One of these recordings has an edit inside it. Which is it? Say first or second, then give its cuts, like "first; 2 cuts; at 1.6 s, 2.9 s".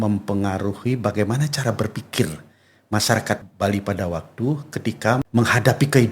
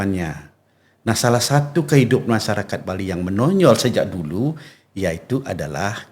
first; 2 cuts; at 3.4 s, 5.2 s